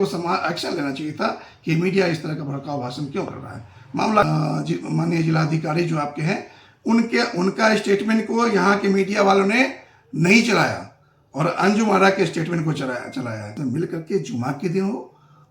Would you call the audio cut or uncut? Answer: cut